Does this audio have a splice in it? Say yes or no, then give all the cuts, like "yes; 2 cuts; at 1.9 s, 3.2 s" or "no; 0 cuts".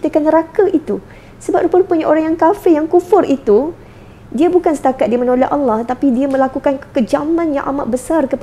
no; 0 cuts